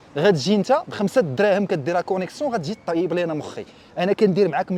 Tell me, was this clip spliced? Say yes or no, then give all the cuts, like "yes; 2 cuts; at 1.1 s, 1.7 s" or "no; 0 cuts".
no; 0 cuts